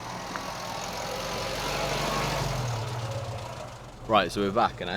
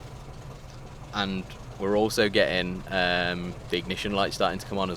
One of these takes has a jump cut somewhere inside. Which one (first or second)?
first